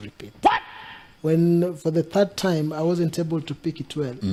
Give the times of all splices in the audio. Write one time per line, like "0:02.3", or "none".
none